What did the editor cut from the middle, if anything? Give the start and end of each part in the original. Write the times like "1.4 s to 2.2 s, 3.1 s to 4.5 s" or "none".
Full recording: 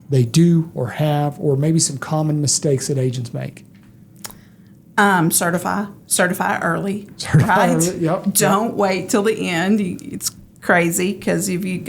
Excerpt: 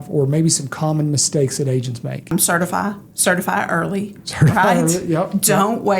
3.6 s to 5.2 s